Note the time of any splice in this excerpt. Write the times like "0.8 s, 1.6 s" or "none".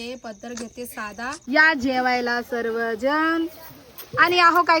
1.3 s